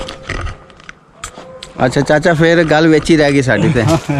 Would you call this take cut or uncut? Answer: uncut